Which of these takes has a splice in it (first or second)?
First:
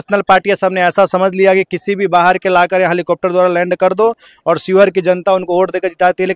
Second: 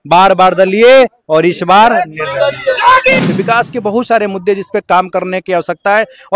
second